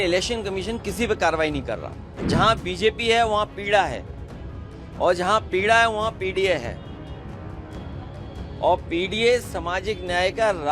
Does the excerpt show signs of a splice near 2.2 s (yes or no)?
yes